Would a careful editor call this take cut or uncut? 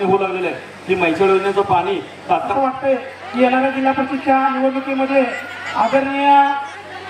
cut